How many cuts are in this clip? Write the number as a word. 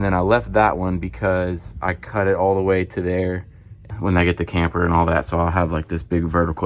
one